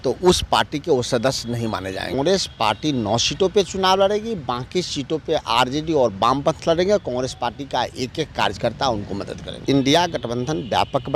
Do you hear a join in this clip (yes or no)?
yes